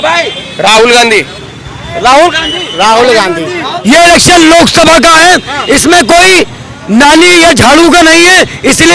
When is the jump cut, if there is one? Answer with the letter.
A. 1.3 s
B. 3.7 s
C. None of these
B